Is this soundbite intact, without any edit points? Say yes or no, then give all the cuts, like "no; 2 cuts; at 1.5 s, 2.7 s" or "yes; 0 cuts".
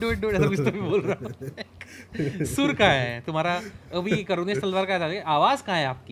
yes; 0 cuts